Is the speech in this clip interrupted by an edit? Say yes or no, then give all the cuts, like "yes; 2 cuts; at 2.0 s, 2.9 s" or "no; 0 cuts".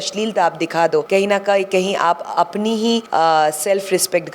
yes; 2 cuts; at 1.1 s, 3.1 s